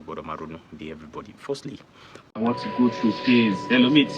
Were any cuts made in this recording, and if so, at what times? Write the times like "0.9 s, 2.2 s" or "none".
1.6 s